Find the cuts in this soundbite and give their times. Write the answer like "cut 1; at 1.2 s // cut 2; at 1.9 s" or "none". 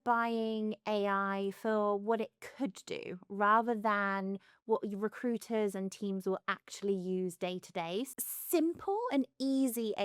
cut 1; at 8.1 s